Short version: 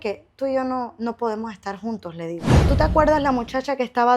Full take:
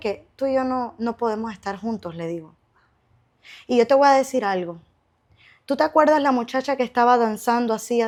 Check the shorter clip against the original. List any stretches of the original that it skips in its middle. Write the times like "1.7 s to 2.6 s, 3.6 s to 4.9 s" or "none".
2.5 s to 5.5 s